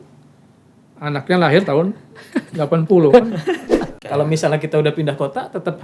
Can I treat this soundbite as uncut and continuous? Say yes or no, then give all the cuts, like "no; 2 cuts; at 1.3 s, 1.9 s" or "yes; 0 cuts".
no; 1 cut; at 3.8 s